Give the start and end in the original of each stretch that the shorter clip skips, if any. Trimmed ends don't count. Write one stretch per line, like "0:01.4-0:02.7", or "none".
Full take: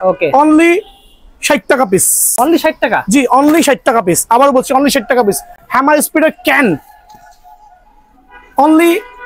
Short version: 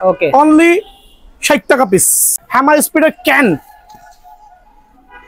0:02.2-0:05.4